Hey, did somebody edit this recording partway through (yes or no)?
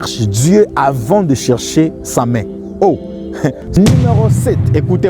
yes